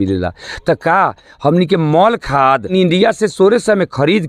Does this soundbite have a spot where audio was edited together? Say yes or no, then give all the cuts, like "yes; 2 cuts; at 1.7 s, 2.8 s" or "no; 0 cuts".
yes; 1 cut; at 2.7 s